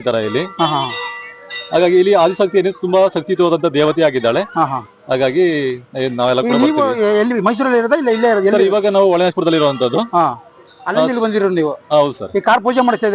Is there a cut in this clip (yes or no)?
no